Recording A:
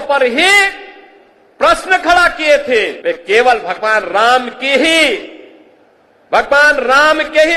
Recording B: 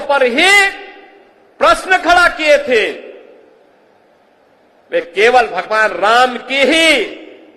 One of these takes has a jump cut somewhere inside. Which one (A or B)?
A